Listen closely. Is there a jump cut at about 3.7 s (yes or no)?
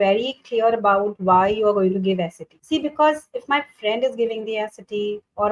no